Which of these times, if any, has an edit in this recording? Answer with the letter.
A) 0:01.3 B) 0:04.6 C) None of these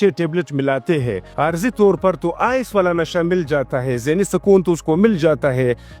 A